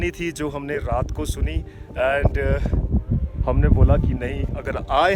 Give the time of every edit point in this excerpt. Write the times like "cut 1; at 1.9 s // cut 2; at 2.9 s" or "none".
none